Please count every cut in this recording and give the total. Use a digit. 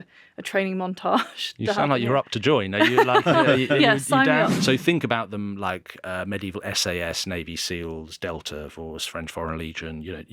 1